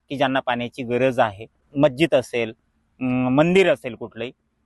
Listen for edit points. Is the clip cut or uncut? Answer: cut